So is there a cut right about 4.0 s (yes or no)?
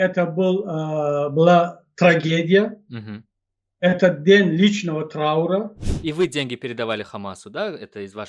no